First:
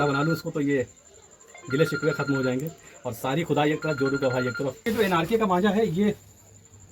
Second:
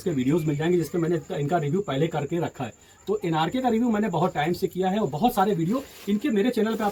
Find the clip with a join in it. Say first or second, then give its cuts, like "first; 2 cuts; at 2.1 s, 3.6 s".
first; 1 cut; at 4.9 s